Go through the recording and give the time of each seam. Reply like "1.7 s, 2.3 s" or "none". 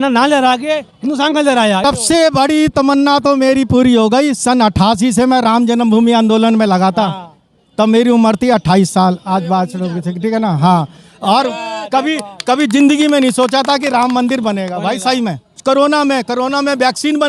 1.8 s, 15.5 s